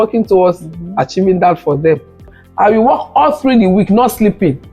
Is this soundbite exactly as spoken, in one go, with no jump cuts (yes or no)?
no